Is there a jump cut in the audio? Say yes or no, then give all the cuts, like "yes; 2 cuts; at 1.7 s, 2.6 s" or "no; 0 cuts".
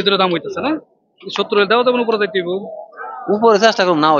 no; 0 cuts